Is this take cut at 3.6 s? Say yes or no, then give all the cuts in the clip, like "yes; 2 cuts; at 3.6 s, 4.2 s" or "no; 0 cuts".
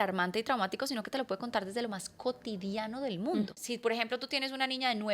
yes; 1 cut; at 3.6 s